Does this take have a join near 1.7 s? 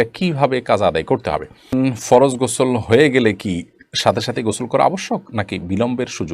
yes; 1 cut; at 1.7 s

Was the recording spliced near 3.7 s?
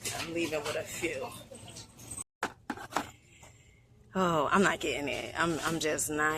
no; 1 cut; at 2.3 s

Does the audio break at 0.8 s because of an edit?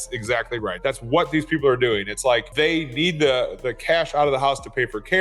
yes; 2 cuts; at 0.8 s, 2.5 s

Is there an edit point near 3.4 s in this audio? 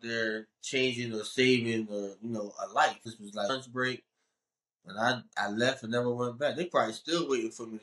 yes; 1 cut; at 3.4 s

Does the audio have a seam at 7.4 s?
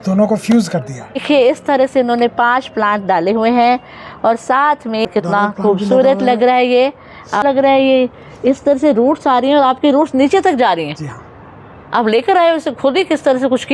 yes; 3 cuts; at 1.2 s, 5.1 s, 7.4 s

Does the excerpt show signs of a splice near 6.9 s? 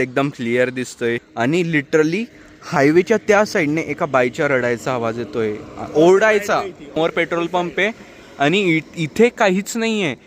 yes; 2 cuts; at 1.2 s, 6.9 s

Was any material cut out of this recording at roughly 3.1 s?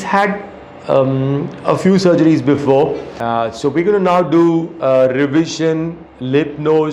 yes; 1 cut; at 3.1 s

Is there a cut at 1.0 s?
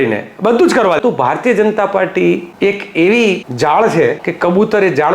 yes; 4 cuts; at 1.0 s, 2.5 s, 3.5 s, 4.3 s

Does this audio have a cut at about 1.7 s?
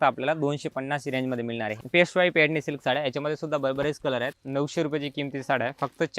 yes; 2 cuts; at 1.7 s, 4.3 s

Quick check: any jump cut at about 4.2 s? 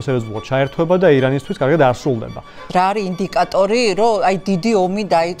no; 1 cut; at 2.6 s

